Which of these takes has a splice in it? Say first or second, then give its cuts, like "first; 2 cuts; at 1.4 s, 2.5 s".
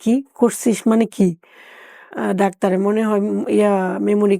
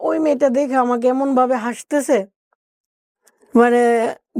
first; 1 cut; at 2.1 s